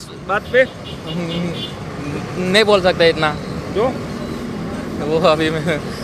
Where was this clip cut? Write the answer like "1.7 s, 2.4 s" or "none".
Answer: none